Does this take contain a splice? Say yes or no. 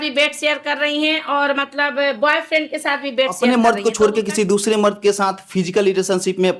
yes